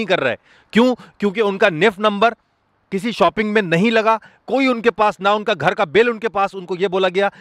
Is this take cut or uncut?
uncut